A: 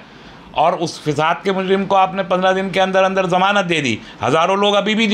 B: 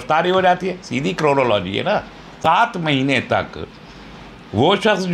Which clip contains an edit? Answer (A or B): B